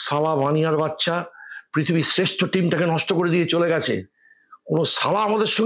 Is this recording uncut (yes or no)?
yes